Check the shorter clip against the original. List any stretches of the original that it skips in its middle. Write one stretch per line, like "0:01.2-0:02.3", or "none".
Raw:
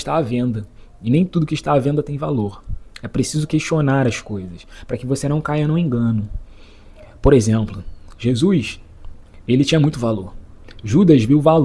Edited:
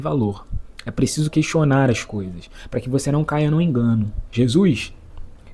0:06.3-0:08.0